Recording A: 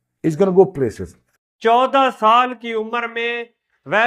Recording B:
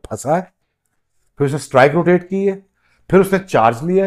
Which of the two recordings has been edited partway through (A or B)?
A